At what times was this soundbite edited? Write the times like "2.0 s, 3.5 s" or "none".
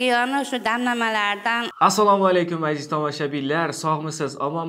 1.7 s